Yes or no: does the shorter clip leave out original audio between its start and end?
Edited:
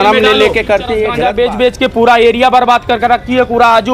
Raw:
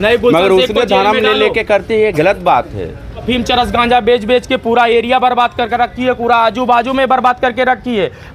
yes